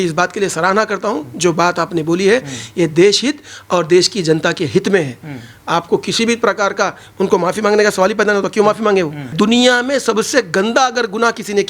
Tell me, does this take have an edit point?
yes; 1 cut; at 9.3 s

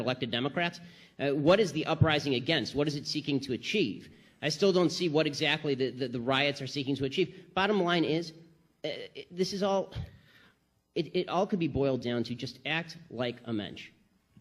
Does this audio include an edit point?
no; 0 cuts

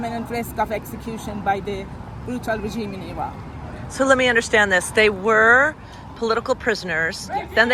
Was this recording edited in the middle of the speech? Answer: no; 0 cuts

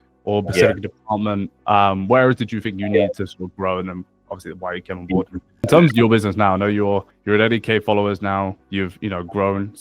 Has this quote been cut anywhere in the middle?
yes; 1 cut; at 5.7 s

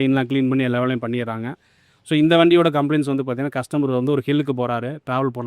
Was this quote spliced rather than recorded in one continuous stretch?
no; 0 cuts

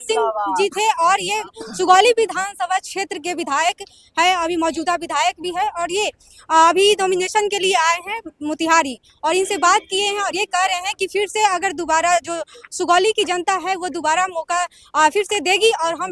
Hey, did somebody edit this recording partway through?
no; 0 cuts

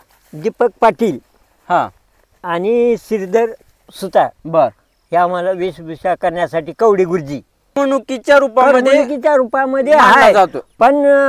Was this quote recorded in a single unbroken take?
no; 1 cut; at 7.8 s

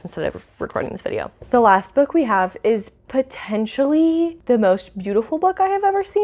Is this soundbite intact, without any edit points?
no; 2 cuts; at 1.3 s, 4.4 s

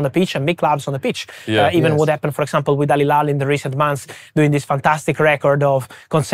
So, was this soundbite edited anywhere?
no; 0 cuts

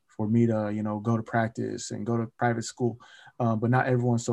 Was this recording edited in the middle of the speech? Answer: yes; 1 cut; at 2.3 s

